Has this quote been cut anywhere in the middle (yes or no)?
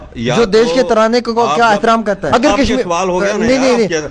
yes